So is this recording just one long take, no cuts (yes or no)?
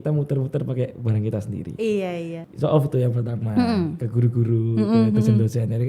no